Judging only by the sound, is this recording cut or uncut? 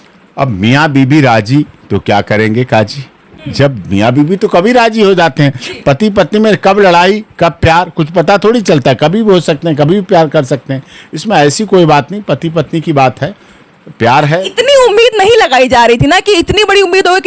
uncut